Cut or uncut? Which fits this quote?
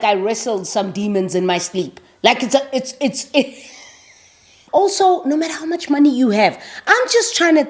cut